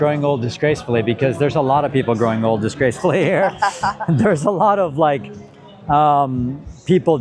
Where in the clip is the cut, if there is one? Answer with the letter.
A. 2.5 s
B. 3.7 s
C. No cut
C